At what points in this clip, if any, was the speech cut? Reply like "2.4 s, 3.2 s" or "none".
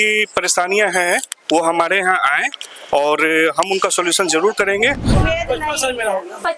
5.1 s